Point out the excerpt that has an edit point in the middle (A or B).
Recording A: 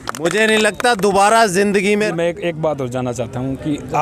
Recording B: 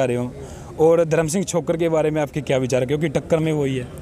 A